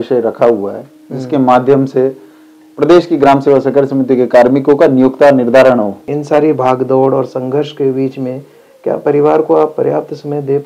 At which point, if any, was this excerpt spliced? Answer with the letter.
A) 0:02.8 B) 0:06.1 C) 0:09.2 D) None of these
B